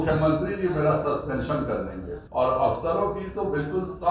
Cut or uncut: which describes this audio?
cut